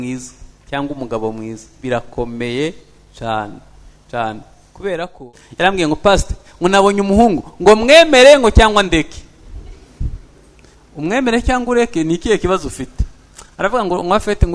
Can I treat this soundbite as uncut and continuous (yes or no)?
no